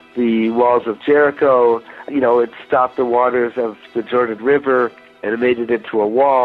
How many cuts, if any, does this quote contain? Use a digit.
2